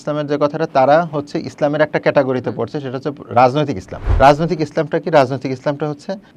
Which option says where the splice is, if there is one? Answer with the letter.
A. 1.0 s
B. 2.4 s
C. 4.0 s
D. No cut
C